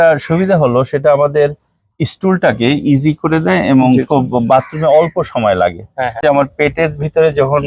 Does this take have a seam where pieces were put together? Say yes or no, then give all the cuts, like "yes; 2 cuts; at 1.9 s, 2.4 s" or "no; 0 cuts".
yes; 1 cut; at 6.2 s